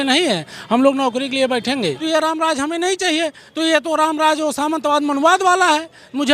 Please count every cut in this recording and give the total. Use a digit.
1